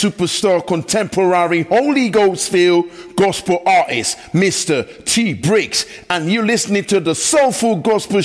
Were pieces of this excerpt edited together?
no; 0 cuts

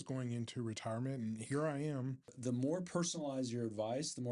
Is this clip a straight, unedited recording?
no; 1 cut; at 2.4 s

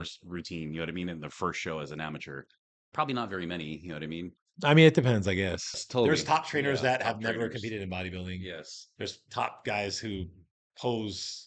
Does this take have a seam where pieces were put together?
yes; 2 cuts; at 4.4 s, 5.8 s

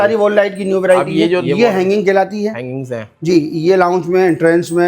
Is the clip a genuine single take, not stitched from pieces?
no; 1 cut; at 1.4 s

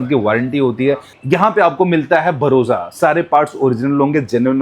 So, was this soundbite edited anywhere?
yes; 1 cut; at 1.1 s

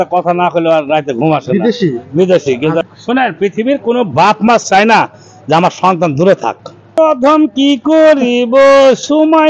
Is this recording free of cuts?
no; 2 cuts; at 2.9 s, 7.0 s

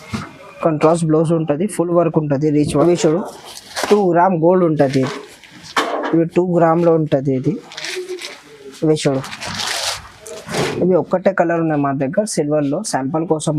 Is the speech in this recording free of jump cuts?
no; 1 cut; at 2.8 s

